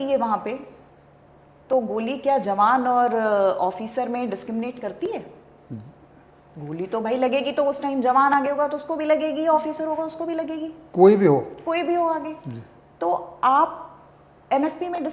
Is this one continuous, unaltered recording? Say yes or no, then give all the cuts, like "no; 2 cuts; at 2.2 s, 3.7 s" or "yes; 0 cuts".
yes; 0 cuts